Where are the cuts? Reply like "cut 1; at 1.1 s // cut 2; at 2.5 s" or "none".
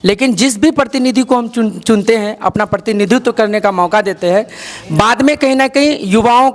none